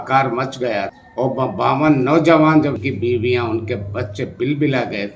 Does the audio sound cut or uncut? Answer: cut